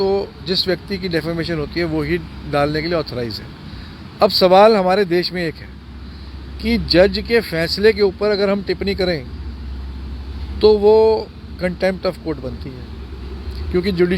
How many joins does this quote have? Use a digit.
0